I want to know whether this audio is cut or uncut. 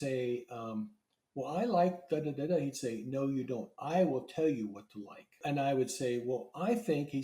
cut